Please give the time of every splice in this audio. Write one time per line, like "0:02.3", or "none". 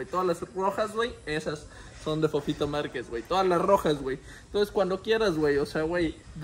none